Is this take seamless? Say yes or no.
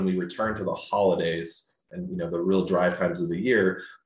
no